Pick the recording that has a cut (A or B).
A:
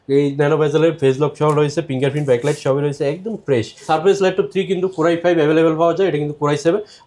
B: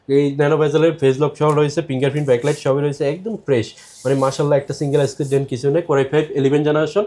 A